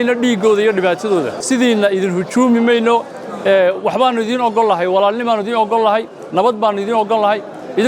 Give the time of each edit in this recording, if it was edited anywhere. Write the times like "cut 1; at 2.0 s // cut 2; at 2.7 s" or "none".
cut 1; at 1.3 s